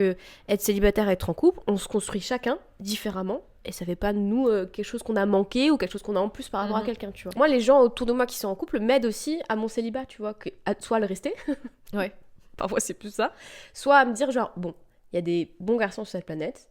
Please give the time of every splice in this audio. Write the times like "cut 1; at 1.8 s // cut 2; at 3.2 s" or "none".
cut 1; at 7.3 s